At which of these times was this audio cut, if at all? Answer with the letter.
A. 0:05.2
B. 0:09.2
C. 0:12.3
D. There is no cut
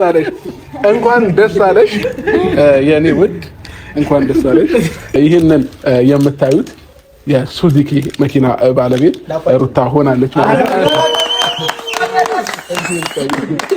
A